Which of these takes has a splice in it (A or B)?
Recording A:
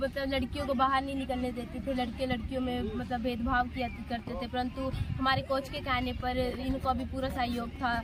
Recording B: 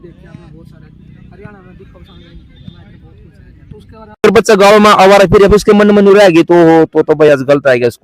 B